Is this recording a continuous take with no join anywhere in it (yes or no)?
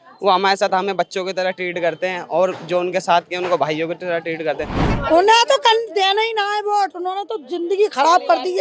no